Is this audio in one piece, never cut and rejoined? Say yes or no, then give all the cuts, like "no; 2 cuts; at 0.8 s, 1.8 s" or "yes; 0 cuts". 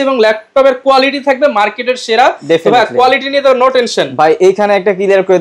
yes; 0 cuts